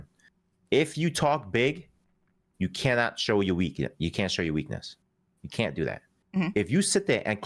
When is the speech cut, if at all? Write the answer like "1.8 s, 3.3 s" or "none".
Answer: none